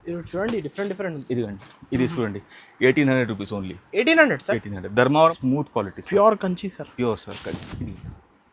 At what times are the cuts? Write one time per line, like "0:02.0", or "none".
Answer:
0:05.4